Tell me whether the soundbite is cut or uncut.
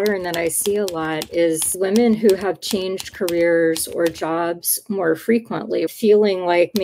cut